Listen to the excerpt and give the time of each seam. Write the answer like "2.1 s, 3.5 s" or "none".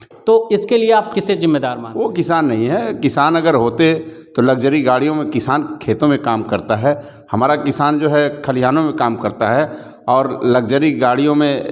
1.8 s